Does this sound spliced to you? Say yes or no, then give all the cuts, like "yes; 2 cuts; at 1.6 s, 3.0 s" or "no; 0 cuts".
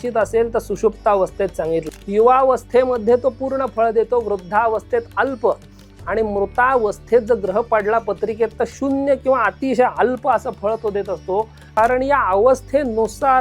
yes; 2 cuts; at 1.9 s, 11.6 s